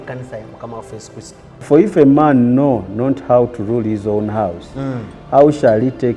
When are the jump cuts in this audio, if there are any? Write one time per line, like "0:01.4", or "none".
0:01.6